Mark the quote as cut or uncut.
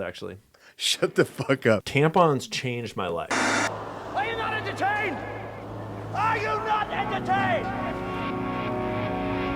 cut